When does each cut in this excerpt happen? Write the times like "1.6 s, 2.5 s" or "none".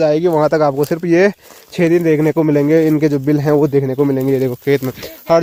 none